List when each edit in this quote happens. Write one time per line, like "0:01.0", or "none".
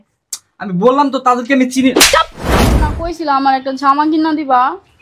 0:02.9